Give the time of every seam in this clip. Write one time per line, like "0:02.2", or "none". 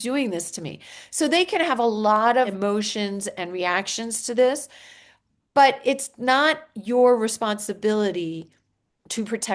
0:02.5